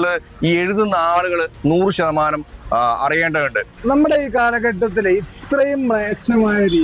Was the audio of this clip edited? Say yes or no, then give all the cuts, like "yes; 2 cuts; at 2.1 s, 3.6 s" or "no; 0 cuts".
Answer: yes; 1 cut; at 3.7 s